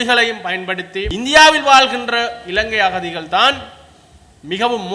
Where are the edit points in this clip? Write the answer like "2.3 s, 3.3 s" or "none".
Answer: 1.1 s